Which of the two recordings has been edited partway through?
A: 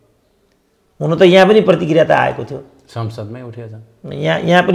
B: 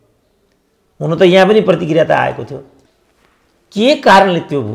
B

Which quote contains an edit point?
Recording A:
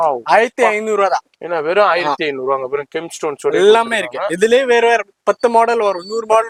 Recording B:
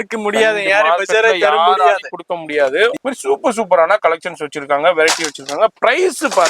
B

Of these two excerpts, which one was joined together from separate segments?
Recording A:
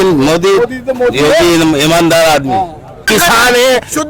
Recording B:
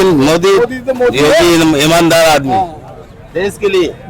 A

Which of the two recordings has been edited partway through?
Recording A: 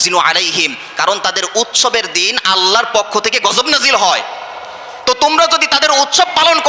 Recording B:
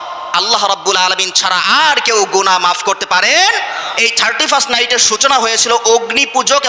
B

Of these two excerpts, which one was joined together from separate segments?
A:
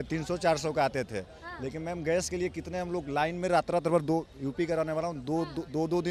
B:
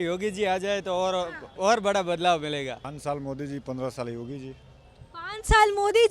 B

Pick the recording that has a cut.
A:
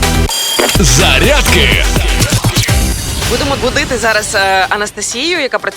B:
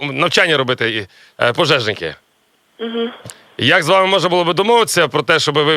A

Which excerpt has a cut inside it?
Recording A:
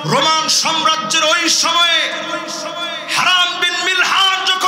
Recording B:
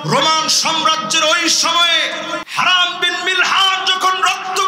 B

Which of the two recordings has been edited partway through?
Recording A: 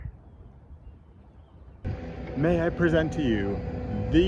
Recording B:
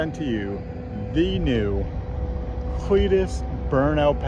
A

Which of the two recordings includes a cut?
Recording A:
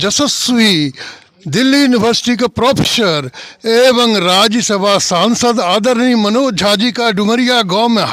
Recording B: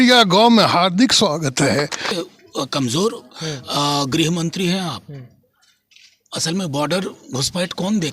B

